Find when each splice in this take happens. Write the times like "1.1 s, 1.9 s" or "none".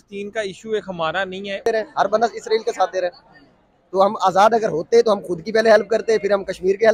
1.7 s